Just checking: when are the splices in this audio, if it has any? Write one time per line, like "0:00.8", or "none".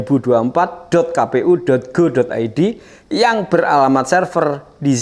none